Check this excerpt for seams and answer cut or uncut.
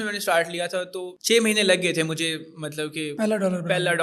uncut